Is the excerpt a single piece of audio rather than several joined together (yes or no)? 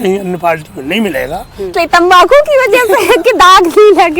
no